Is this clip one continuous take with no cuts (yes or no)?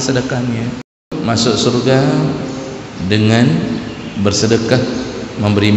no